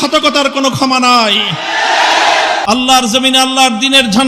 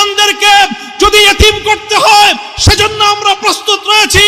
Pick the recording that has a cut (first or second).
first